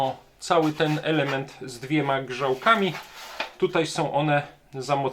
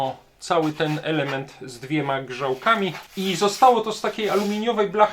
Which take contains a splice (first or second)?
second